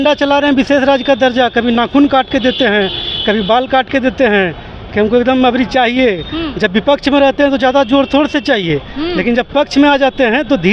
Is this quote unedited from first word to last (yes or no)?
yes